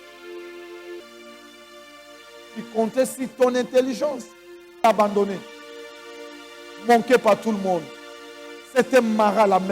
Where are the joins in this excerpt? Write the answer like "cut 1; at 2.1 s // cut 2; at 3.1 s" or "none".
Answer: cut 1; at 1.0 s // cut 2; at 4.8 s